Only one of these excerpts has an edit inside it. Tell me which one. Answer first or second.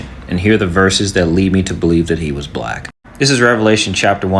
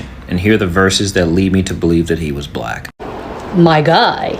second